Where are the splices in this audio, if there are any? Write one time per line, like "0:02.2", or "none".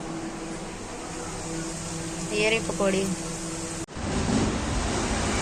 0:03.8